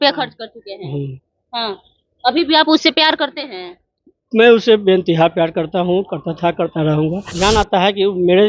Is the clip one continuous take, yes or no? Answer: no